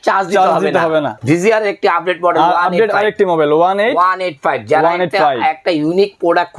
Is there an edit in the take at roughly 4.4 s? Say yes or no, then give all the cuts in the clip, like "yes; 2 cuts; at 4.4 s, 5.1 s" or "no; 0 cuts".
no; 1 cut; at 1.1 s